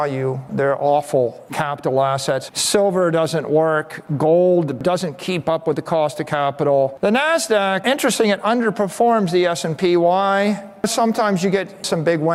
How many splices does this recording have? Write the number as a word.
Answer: zero